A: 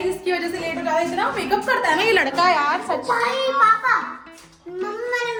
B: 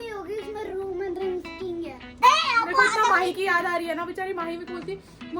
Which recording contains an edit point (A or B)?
B